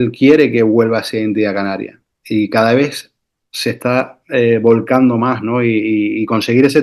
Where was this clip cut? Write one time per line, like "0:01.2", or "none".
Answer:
none